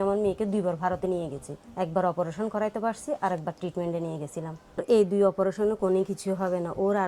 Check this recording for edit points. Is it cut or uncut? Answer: cut